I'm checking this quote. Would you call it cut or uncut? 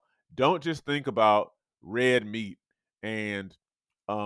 uncut